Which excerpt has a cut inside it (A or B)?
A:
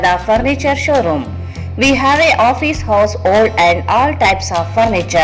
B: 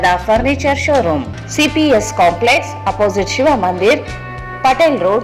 B